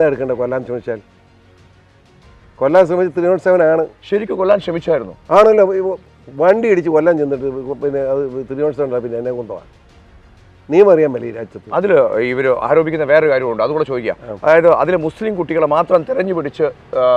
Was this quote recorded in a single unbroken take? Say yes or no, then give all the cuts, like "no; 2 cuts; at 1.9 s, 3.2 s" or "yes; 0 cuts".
yes; 0 cuts